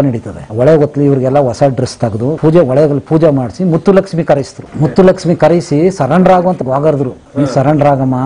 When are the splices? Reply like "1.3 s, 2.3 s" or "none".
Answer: 2.4 s, 4.6 s, 6.6 s